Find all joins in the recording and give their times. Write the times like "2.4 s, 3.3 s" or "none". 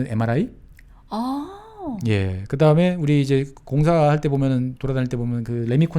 none